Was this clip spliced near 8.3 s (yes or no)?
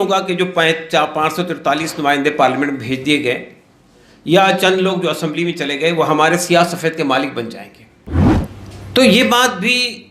yes